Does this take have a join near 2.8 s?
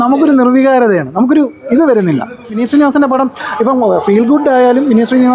yes; 1 cut; at 2.8 s

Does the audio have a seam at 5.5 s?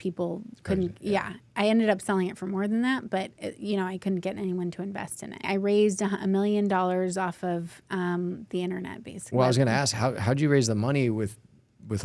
yes; 2 cuts; at 5.5 s, 9.2 s

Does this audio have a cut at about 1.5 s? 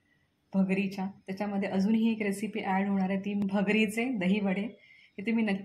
no; 1 cut; at 3.4 s

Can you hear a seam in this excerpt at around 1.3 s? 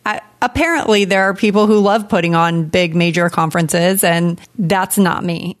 no; 1 cut; at 4.5 s

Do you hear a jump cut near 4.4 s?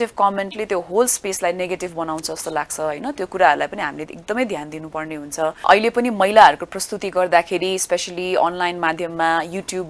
no; 1 cut; at 5.7 s

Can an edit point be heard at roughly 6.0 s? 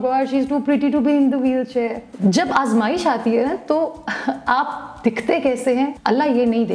yes; 2 cuts; at 2.0 s, 6.0 s

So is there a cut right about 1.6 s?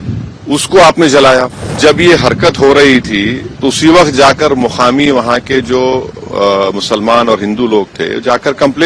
yes; 1 cut; at 1.6 s

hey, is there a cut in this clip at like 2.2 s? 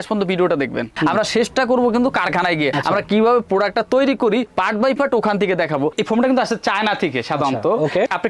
no; 2 cuts; at 0.9 s, 5.9 s

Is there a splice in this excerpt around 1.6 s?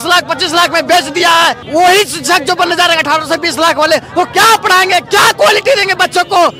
yes; 1 cut; at 1.6 s

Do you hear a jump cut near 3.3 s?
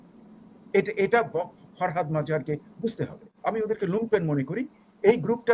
yes; 1 cut; at 3.3 s

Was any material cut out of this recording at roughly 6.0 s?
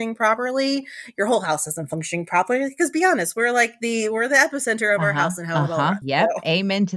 yes; 1 cut; at 6.0 s

